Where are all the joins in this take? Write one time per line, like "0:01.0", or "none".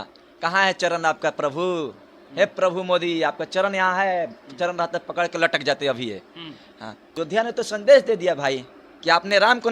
0:07.1

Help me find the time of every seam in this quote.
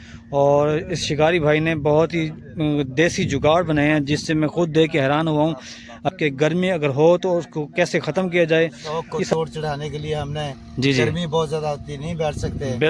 0:06.1
0:09.3

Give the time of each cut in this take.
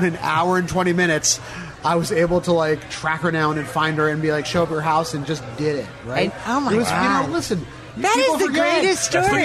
none

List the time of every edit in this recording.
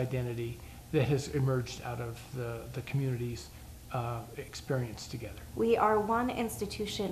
0:05.4

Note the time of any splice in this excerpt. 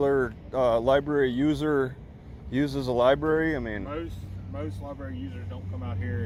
none

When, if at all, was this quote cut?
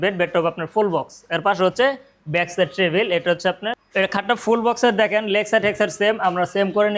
none

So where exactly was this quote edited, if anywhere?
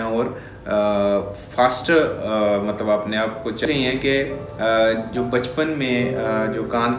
0:03.6

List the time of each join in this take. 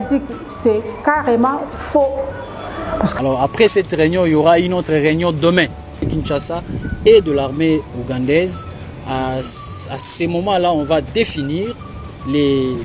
0:03.1
0:06.1

